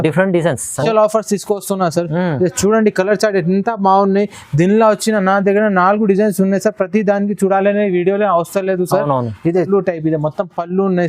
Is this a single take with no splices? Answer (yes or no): no